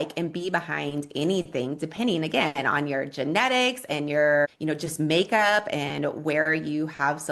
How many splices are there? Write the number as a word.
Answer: one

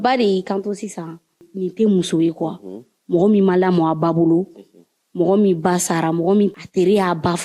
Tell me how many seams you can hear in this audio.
two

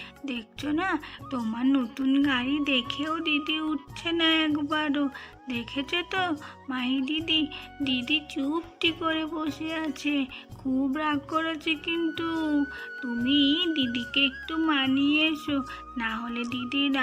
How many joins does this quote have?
zero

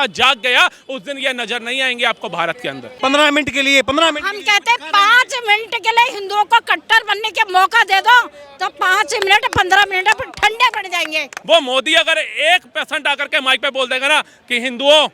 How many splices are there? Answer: two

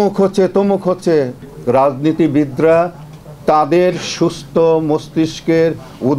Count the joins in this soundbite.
one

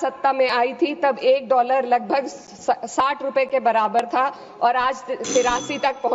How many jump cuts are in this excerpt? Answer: zero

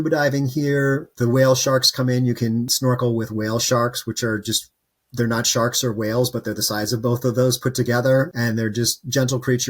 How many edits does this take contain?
one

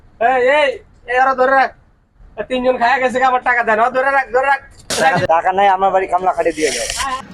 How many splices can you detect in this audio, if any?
one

